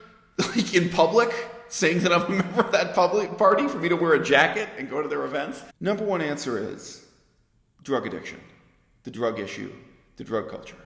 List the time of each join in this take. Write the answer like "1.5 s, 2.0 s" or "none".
5.6 s